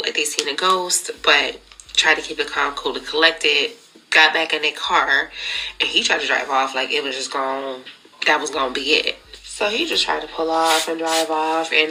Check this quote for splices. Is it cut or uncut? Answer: uncut